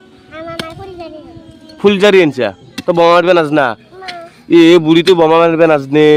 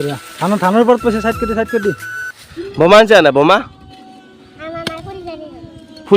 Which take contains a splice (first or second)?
second